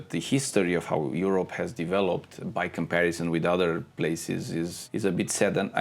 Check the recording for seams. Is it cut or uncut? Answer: cut